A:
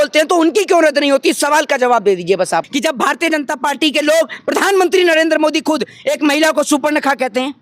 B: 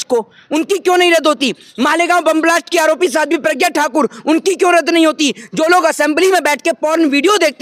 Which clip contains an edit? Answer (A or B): A